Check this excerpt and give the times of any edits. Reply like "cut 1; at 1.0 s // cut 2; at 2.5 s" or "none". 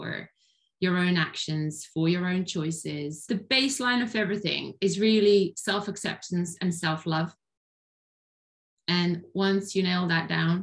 cut 1; at 3.2 s